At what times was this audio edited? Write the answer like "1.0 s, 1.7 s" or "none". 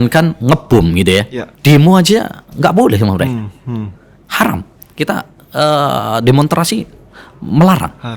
1.4 s